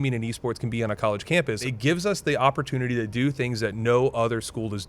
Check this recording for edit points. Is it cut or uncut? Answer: cut